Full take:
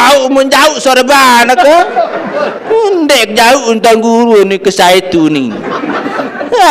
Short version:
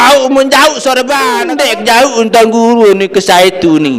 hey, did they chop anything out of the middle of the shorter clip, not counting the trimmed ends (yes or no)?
yes